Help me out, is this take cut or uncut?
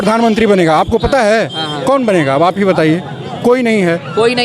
uncut